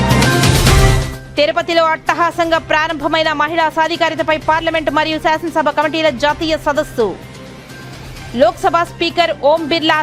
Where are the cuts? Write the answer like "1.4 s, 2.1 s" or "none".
1.1 s